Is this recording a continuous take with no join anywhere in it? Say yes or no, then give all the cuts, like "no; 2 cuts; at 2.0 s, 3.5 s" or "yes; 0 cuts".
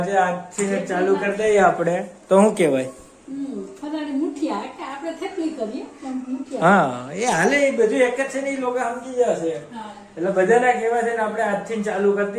yes; 0 cuts